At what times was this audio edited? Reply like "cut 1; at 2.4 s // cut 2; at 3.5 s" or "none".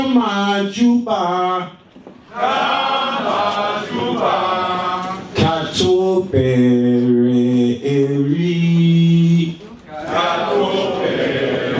none